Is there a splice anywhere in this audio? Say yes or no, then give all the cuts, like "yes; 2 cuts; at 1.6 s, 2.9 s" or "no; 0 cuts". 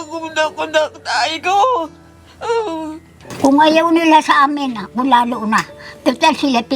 yes; 1 cut; at 3.2 s